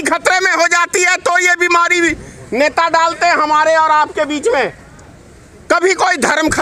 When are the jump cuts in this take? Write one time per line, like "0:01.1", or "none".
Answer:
none